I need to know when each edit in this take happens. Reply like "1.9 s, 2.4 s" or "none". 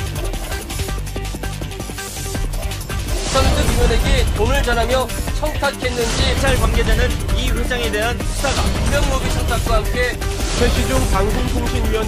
none